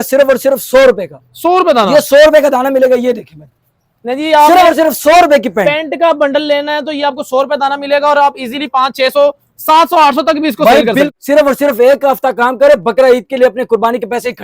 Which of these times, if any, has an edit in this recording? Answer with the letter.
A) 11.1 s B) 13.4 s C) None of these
A